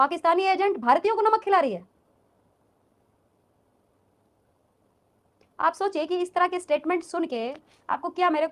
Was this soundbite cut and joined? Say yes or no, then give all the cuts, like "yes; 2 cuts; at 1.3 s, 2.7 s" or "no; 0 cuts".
no; 0 cuts